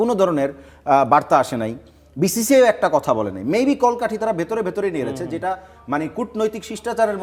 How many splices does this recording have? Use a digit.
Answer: 0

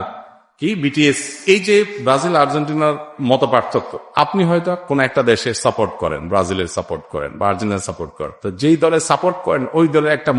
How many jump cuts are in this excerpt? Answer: 1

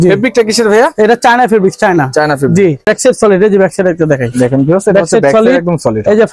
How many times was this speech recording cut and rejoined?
1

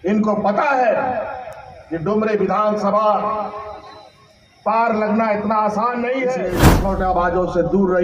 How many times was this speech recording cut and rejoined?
1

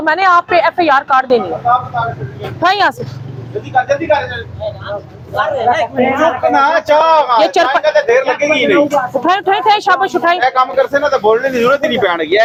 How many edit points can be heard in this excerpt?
0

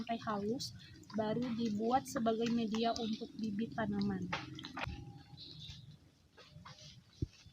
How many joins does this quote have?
1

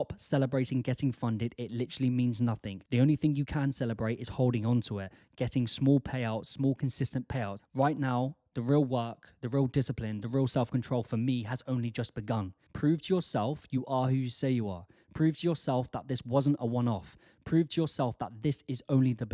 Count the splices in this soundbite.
3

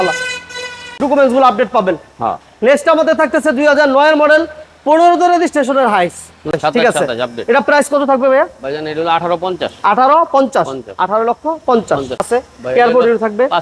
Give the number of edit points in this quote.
3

